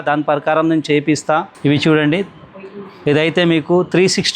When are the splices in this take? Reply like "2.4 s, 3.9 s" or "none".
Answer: 1.5 s